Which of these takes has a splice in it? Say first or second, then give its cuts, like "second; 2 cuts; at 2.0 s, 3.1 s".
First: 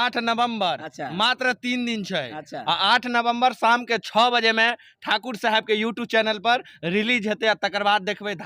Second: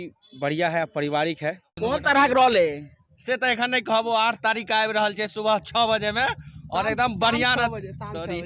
second; 1 cut; at 1.7 s